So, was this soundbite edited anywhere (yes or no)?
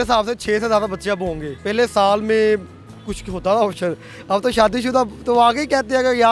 no